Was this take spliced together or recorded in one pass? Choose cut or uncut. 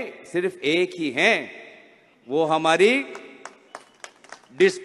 uncut